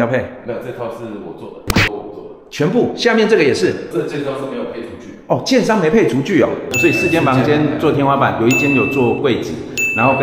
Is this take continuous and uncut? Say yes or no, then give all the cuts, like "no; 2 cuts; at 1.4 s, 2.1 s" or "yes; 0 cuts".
no; 3 cuts; at 1.7 s, 3.9 s, 6.7 s